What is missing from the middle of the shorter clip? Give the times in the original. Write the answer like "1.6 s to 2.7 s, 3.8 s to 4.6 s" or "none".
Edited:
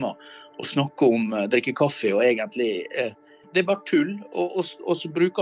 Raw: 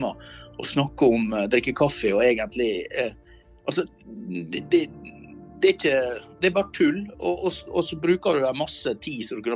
3.4 s to 6.2 s